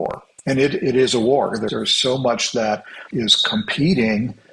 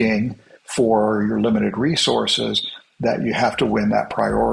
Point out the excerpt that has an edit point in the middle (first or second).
first